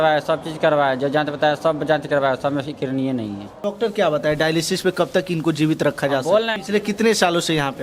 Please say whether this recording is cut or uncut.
cut